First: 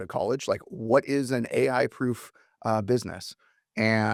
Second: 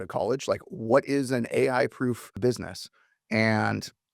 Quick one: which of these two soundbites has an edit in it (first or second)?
second